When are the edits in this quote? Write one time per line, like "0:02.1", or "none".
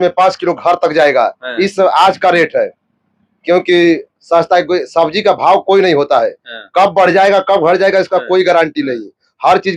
none